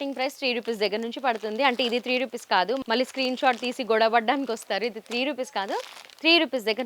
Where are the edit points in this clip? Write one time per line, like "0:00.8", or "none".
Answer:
none